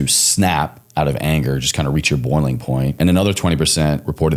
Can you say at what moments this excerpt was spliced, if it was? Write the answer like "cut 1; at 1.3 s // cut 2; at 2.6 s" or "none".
cut 1; at 2.9 s